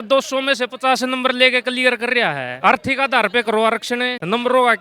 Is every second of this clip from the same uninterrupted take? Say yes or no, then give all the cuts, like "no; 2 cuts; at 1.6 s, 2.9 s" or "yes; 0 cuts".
yes; 0 cuts